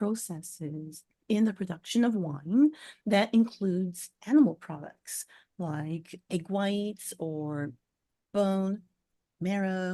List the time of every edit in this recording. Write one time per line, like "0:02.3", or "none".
none